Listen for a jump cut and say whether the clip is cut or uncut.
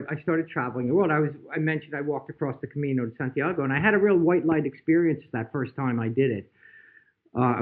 uncut